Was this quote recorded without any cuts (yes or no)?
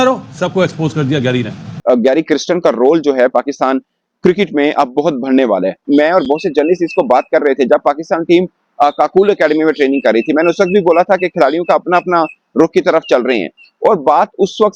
no